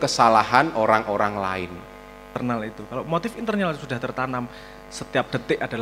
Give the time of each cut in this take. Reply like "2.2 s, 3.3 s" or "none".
2.3 s